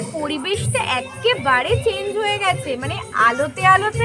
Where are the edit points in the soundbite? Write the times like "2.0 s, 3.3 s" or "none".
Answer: none